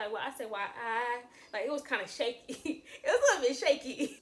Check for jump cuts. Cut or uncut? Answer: uncut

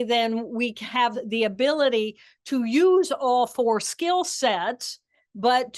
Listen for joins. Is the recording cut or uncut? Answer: uncut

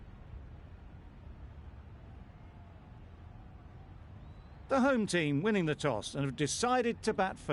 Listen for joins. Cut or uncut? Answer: uncut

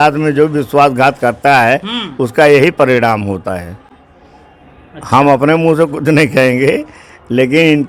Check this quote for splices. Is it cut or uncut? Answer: uncut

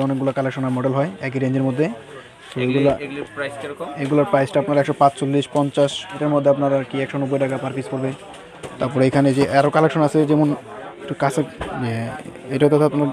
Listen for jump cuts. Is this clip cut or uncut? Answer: cut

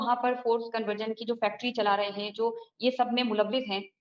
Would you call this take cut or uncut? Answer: uncut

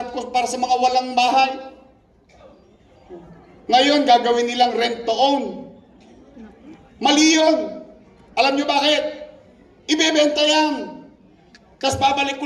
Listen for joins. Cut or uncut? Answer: uncut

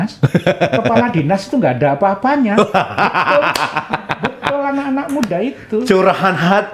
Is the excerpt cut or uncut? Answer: uncut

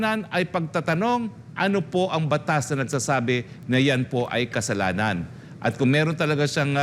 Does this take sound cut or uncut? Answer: uncut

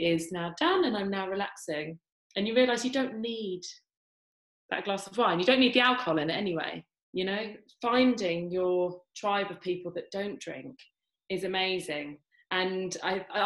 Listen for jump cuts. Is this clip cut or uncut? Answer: cut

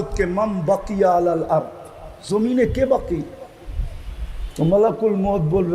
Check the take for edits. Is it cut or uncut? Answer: uncut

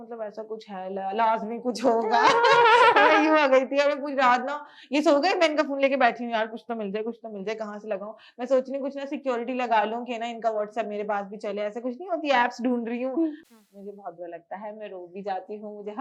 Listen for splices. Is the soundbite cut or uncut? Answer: cut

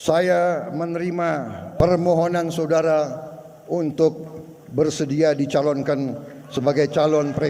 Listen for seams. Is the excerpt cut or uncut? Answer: cut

